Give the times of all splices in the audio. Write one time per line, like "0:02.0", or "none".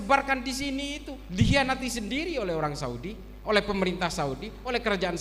none